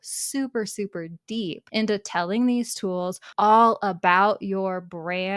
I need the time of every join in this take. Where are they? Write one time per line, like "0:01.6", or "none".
0:01.6
0:03.2

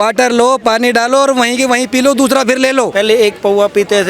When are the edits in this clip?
0:02.9

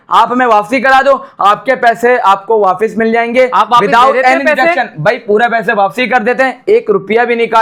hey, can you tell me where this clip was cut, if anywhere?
none

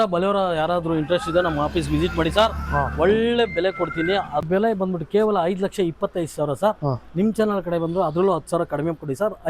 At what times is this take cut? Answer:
0:04.4

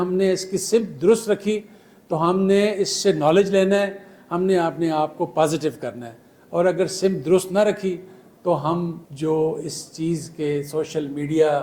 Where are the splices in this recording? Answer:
0:09.0

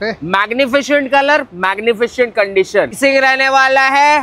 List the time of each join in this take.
0:03.0

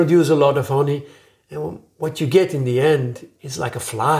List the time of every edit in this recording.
none

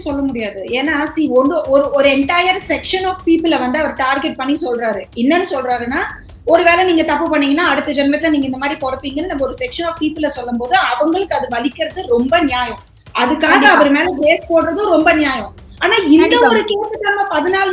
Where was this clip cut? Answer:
none

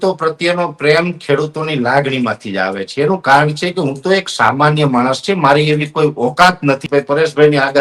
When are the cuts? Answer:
0:06.8

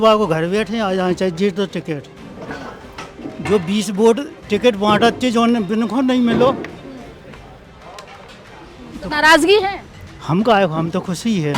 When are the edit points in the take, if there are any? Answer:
none

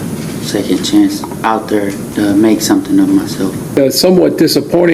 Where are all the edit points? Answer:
0:03.8

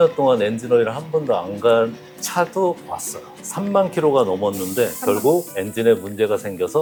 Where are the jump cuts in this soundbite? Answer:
none

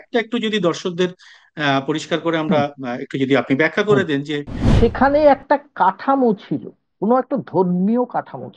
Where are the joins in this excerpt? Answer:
0:04.7

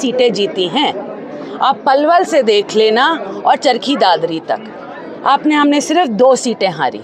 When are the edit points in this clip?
none

